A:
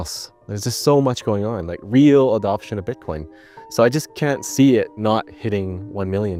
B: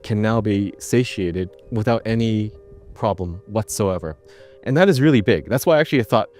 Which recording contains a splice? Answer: B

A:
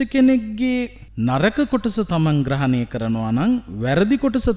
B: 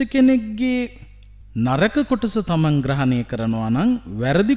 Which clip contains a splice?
A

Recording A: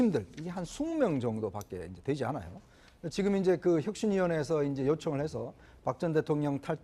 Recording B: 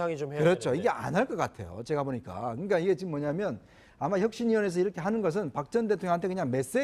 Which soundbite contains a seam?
B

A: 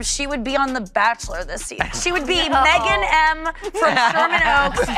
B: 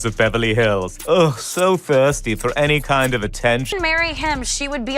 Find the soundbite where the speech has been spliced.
B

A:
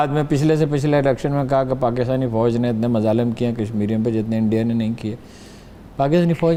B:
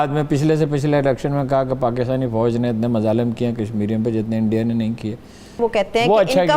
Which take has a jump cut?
B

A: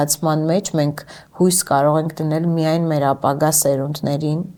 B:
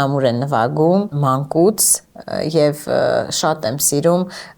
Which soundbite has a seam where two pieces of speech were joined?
B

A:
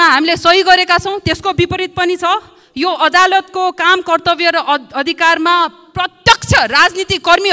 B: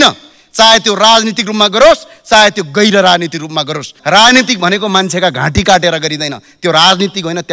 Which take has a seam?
B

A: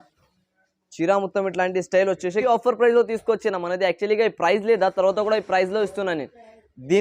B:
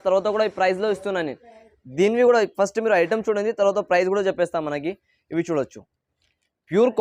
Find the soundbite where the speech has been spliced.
A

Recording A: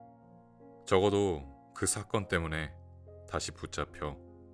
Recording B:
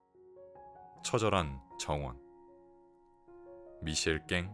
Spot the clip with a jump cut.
B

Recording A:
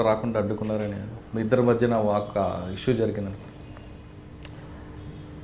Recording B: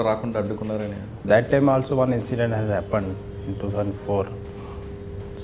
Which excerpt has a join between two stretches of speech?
B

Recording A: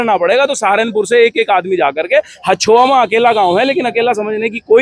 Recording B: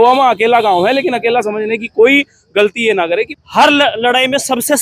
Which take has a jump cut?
B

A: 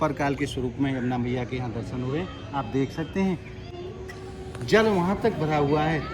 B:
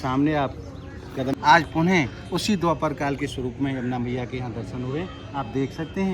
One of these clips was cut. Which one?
B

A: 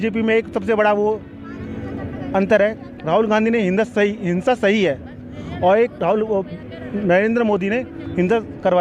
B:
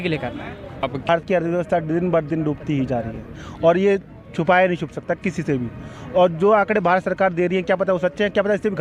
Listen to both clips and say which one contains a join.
B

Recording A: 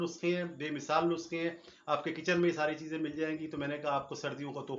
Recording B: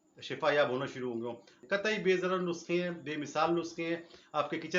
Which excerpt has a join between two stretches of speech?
B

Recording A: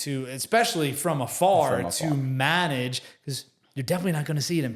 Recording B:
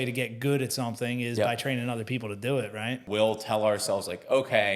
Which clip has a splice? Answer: B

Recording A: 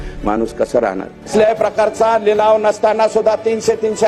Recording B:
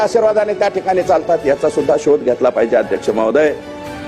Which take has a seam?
A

